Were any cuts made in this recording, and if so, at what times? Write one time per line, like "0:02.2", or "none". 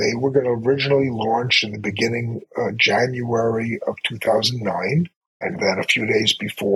0:02.4
0:05.2